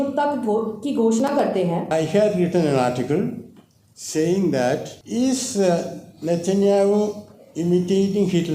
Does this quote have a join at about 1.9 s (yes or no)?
yes